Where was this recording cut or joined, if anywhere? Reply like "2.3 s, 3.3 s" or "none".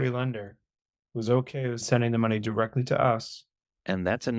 none